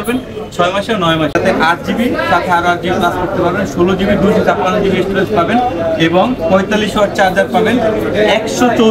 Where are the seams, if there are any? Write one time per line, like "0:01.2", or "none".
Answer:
0:01.3